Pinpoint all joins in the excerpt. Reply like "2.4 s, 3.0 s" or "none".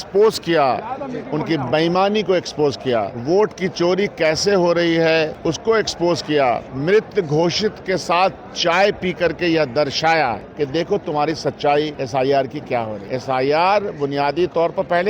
3.1 s, 5.3 s, 6.7 s, 10.4 s, 12.0 s, 13.0 s